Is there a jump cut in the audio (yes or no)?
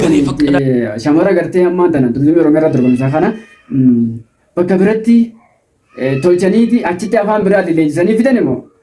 no